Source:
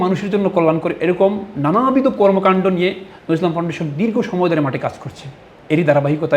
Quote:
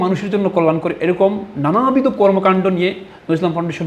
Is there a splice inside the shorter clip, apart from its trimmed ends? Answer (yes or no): no